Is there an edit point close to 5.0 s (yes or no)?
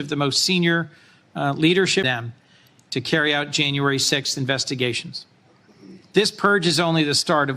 no